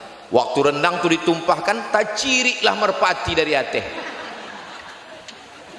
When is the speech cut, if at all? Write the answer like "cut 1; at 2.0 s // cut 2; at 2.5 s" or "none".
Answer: none